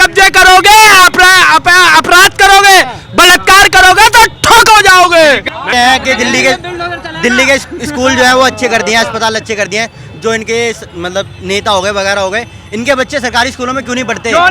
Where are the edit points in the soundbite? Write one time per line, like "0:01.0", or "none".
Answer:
0:05.5